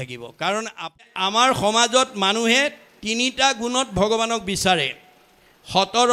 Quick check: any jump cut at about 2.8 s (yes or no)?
no